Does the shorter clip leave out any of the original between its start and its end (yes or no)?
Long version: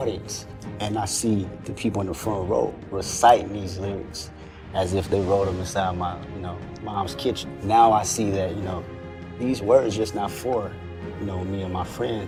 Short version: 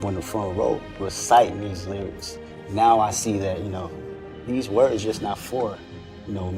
yes